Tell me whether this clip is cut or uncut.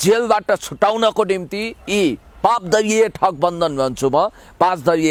uncut